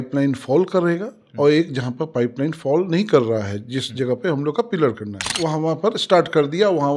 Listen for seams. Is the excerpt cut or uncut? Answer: cut